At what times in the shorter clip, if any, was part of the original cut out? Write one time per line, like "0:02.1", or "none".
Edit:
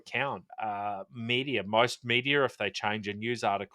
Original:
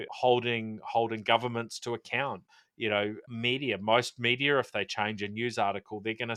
0:00.9